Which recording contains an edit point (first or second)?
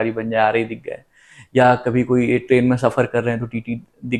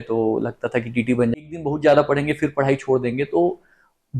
second